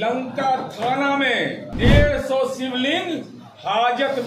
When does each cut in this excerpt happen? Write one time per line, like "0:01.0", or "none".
0:01.6